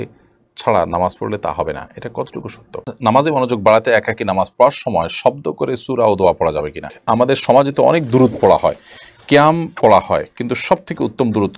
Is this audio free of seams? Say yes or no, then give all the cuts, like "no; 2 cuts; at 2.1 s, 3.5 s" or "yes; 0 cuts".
no; 2 cuts; at 2.9 s, 7.0 s